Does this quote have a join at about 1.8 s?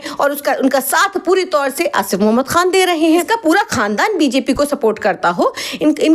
no; 1 cut; at 3.3 s

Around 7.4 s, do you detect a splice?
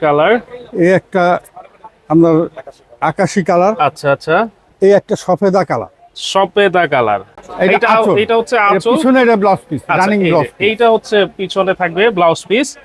yes; 1 cut; at 7.4 s

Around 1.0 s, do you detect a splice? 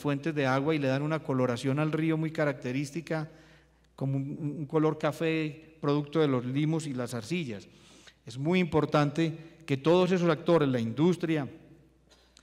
no; 0 cuts

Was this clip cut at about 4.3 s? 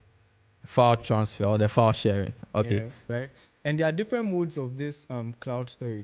no; 1 cut; at 3.0 s

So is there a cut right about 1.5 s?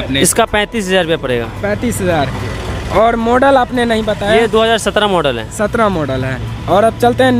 no; 0 cuts

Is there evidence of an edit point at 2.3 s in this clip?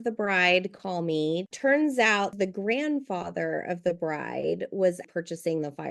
yes; 2 cuts; at 1.5 s, 2.3 s

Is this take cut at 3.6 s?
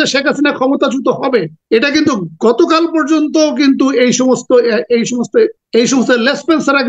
no; 2 cuts; at 1.6 s, 5.6 s

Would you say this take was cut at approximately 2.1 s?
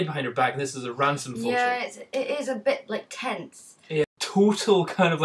no; 1 cut; at 4.0 s

